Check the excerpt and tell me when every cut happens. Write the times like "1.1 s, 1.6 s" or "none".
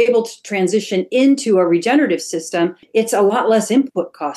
2.8 s